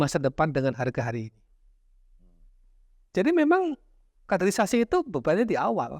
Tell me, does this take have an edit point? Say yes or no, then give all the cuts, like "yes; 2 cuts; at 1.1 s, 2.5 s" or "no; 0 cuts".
yes; 1 cut; at 2.5 s